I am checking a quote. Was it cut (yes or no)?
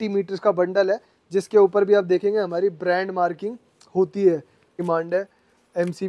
yes